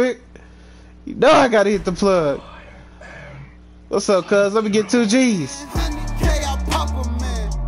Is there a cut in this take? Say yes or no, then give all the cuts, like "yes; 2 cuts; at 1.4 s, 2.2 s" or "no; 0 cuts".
yes; 1 cut; at 5.7 s